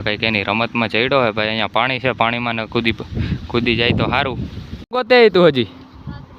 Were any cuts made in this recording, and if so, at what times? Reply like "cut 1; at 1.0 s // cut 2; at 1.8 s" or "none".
cut 1; at 4.9 s